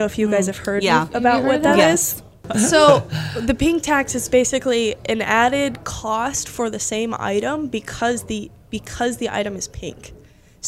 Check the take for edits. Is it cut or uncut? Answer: cut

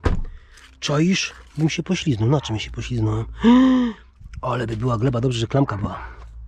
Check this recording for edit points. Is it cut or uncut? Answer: uncut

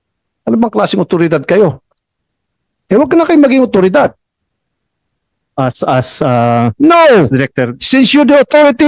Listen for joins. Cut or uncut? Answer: uncut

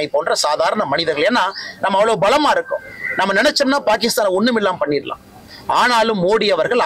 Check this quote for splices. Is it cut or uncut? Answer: uncut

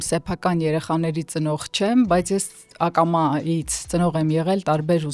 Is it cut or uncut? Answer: uncut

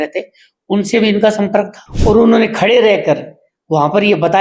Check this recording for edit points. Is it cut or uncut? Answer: cut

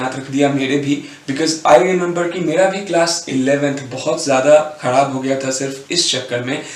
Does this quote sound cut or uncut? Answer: uncut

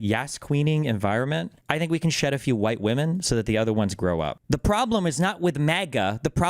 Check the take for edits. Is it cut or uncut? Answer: cut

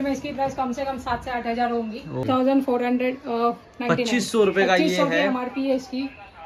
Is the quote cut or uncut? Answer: cut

